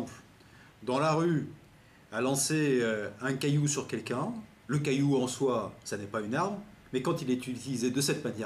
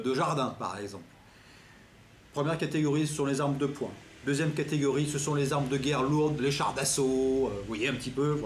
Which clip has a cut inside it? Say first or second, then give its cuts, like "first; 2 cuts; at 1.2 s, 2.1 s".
first; 1 cut; at 4.2 s